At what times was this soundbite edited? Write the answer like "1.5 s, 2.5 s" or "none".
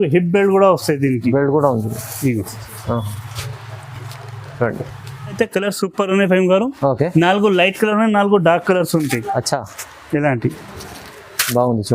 5.4 s